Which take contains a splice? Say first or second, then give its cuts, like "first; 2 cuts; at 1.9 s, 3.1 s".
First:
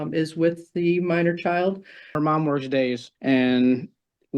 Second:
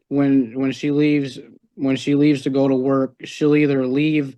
first; 2 cuts; at 2.1 s, 3.1 s